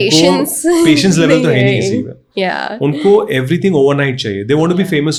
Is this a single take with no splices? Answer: yes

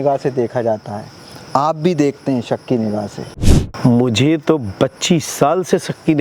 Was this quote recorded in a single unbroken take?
no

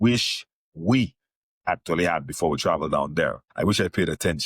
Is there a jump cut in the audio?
yes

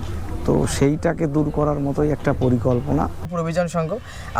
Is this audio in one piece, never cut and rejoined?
no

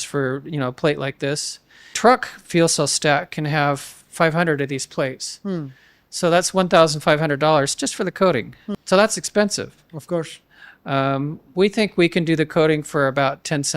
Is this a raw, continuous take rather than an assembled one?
no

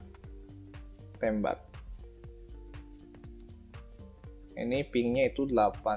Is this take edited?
no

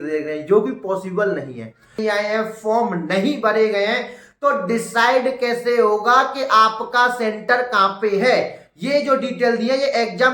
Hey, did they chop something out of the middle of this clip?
yes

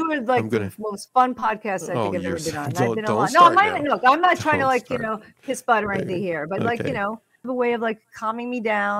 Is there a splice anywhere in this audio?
yes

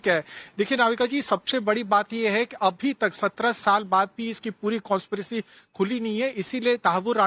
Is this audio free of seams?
yes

